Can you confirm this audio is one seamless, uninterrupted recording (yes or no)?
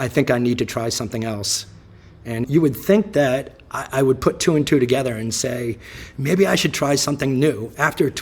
no